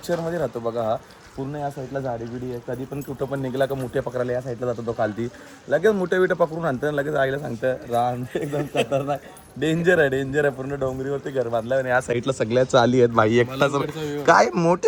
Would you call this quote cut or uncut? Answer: uncut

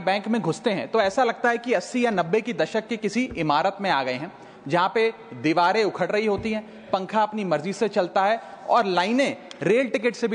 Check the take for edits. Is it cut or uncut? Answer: uncut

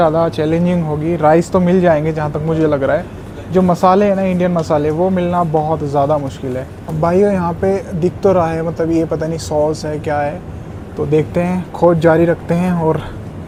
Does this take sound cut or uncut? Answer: uncut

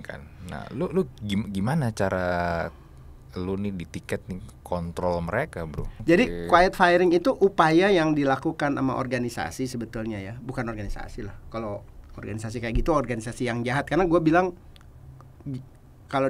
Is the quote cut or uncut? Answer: cut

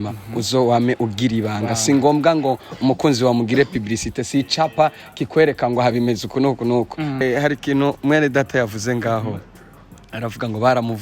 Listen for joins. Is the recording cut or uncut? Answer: cut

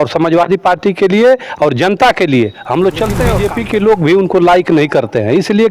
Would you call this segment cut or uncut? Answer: cut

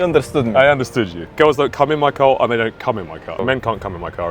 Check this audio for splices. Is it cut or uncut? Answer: cut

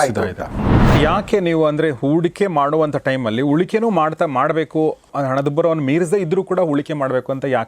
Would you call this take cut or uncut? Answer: cut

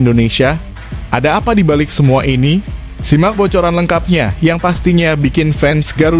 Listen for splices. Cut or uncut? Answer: uncut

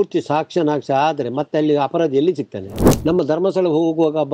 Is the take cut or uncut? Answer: cut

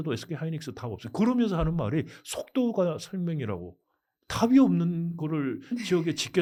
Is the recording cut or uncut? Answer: uncut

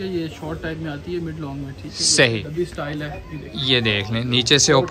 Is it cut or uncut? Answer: cut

